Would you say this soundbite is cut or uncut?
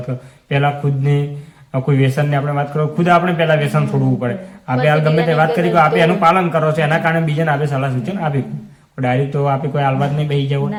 uncut